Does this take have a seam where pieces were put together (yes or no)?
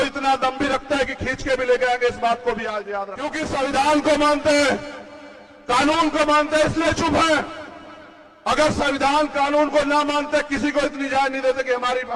yes